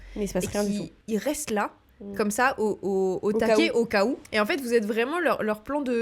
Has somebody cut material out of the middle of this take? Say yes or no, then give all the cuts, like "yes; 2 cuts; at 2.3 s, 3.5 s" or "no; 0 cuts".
yes; 2 cuts; at 1.0 s, 4.2 s